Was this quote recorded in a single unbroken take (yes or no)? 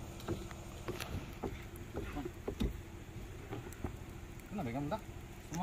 no